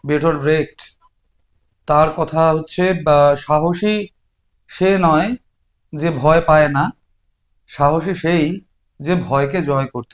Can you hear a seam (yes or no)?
no